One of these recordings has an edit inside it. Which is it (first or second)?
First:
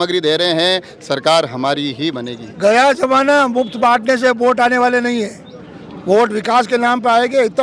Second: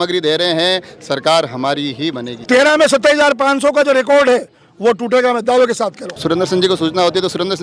second